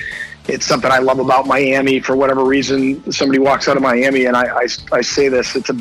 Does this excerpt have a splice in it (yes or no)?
no